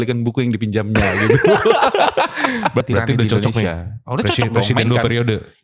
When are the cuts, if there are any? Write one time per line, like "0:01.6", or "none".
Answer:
0:02.8